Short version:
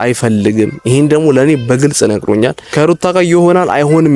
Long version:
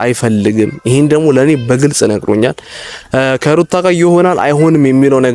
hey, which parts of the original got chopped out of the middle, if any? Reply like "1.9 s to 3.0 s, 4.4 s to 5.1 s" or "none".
2.7 s to 3.4 s